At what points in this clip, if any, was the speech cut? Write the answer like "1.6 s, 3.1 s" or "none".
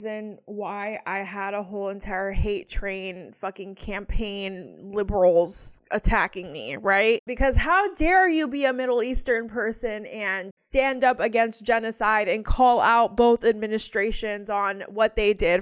none

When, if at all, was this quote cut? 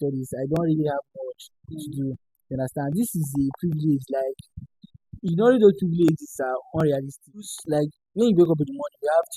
7.6 s

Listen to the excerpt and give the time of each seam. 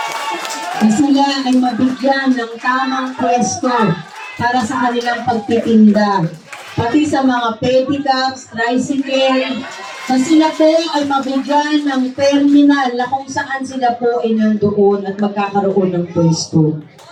none

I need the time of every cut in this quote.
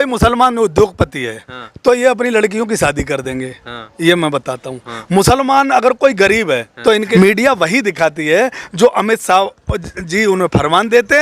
7.1 s

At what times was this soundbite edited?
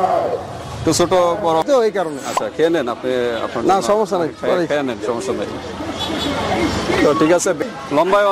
1.6 s, 7.6 s

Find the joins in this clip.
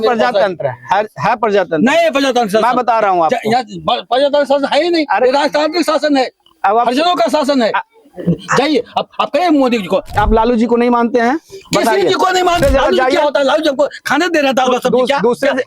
10.2 s, 12.6 s

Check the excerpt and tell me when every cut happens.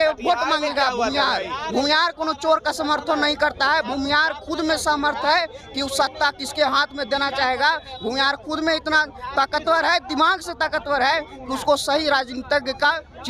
none

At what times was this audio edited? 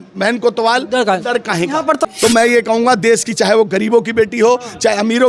2.0 s

